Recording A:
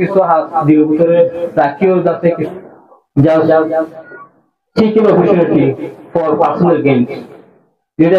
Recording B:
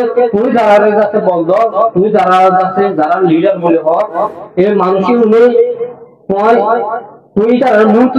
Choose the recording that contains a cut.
A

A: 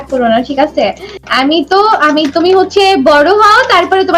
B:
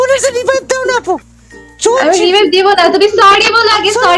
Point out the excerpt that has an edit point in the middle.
B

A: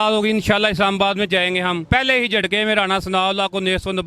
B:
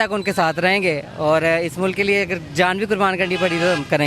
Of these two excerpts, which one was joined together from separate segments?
A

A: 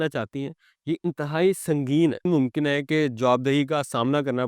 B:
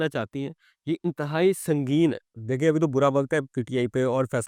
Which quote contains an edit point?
A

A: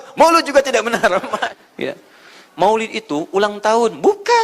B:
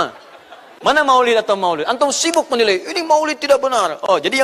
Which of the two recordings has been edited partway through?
A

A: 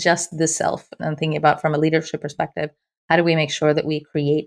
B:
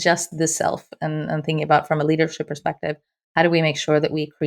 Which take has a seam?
A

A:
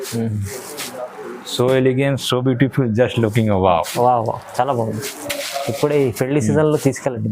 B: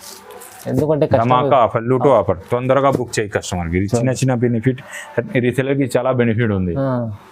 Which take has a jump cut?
A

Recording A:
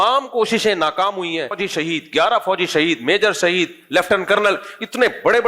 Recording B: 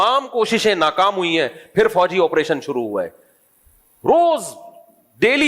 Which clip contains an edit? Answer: A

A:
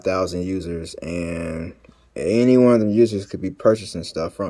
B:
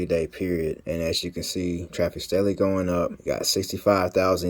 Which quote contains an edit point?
B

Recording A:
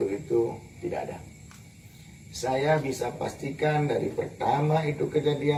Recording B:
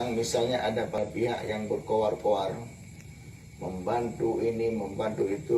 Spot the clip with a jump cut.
B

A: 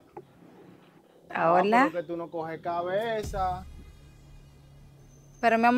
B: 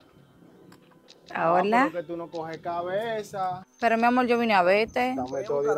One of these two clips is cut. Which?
B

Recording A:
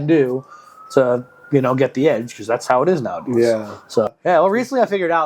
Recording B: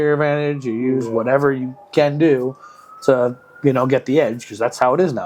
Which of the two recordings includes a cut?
A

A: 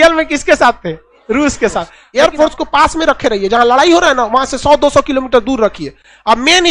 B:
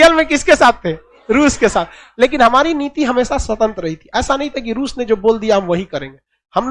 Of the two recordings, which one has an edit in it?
A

